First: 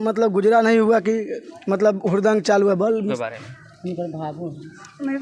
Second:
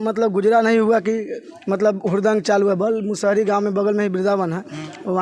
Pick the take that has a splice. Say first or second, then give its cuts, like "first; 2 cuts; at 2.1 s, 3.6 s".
first; 1 cut; at 3.1 s